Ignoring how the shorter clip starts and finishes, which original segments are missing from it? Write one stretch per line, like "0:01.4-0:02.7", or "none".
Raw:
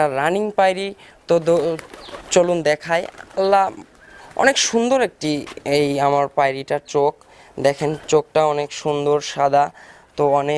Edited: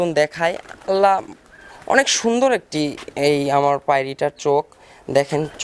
none